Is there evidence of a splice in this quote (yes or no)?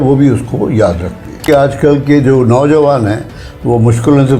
yes